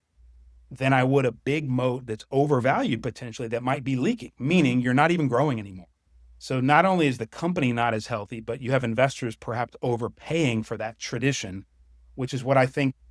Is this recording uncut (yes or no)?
yes